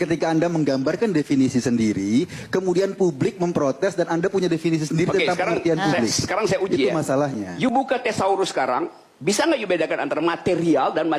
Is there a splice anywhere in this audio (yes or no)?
no